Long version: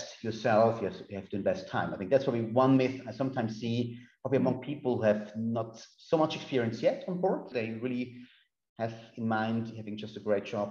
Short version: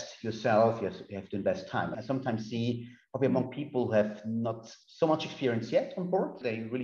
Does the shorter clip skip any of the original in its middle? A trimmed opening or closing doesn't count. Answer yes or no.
yes